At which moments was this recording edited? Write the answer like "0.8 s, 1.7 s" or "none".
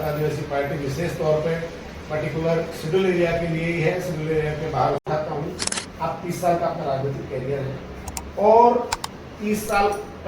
5.1 s